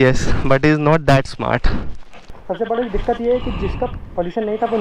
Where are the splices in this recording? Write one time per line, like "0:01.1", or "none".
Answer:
0:02.3